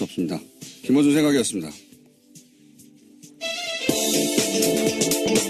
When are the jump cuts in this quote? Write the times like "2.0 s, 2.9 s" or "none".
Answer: none